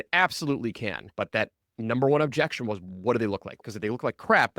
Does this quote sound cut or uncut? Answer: cut